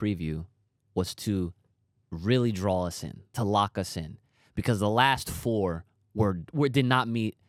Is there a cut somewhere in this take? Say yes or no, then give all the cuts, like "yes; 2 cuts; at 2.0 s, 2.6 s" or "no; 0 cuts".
no; 0 cuts